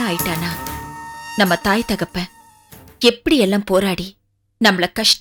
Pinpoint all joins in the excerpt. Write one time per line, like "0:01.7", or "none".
none